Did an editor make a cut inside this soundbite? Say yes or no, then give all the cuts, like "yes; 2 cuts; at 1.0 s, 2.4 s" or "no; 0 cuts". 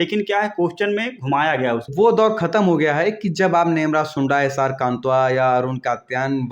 yes; 1 cut; at 1.9 s